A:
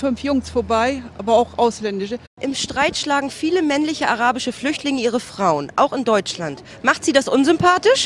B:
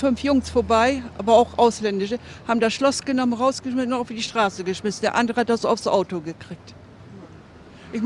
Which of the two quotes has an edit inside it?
B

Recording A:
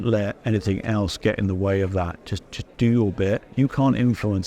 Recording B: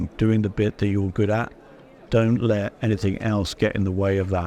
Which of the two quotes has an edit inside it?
A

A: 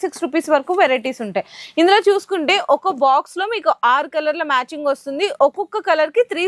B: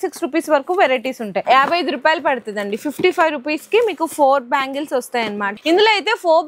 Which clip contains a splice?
B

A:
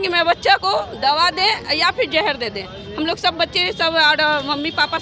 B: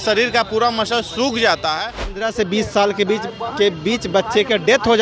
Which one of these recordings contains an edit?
B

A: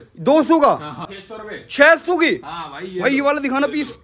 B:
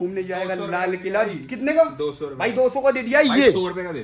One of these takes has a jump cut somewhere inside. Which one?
A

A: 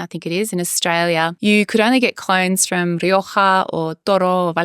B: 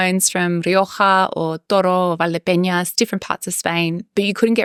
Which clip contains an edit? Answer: A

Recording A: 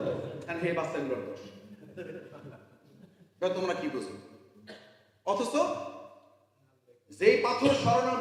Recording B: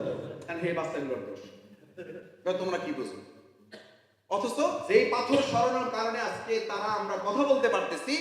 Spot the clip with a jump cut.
B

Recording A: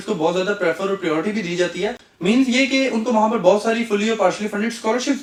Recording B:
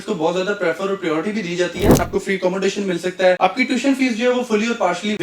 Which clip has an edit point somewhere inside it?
B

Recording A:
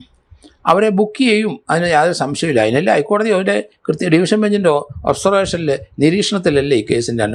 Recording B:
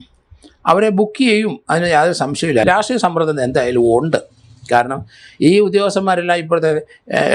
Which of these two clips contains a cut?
B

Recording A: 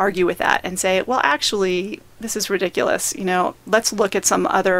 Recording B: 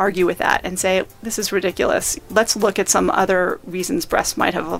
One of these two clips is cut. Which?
B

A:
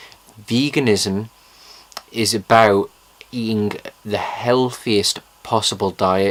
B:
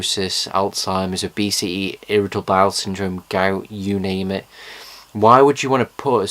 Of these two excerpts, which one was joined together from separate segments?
B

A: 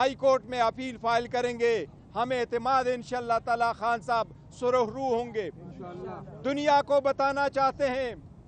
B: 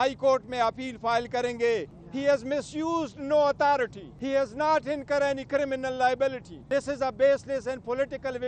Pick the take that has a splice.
B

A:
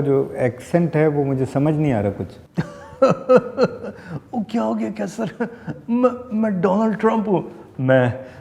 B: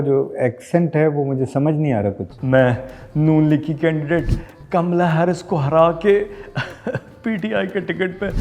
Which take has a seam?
B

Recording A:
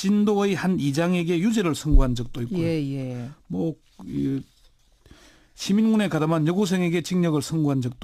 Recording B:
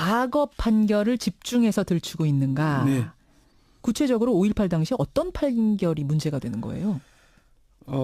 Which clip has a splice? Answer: B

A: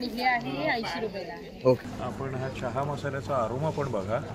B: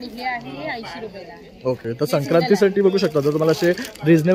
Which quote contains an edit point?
A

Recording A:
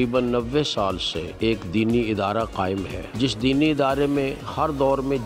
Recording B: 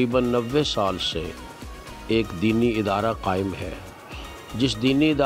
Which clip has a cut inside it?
A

